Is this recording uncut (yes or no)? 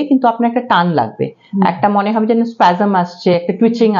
yes